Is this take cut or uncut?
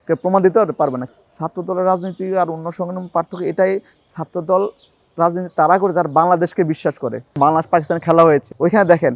cut